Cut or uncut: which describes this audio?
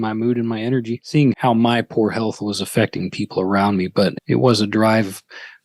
cut